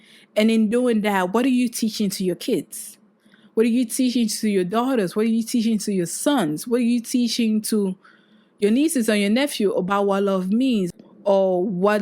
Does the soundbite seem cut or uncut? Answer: cut